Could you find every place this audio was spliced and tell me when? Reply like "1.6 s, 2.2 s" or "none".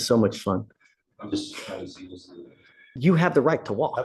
2.8 s